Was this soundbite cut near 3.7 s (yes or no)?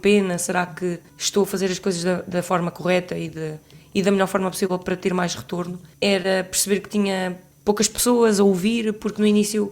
no